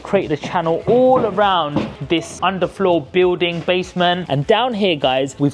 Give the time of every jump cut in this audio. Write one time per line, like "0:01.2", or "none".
0:02.0
0:04.2